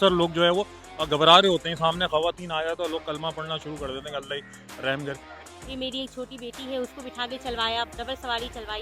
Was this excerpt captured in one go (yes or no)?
no